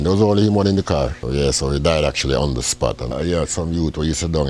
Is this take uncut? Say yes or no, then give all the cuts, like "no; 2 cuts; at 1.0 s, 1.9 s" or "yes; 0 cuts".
no; 2 cuts; at 1.2 s, 3.1 s